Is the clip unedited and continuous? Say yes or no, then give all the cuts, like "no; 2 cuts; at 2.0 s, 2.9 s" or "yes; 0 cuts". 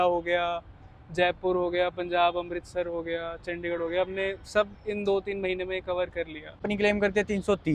no; 1 cut; at 6.6 s